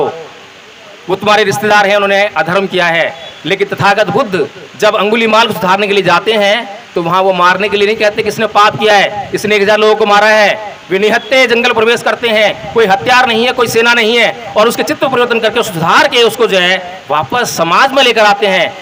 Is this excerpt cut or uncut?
uncut